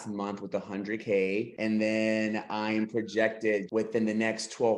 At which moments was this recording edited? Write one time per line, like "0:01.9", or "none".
0:01.5
0:03.7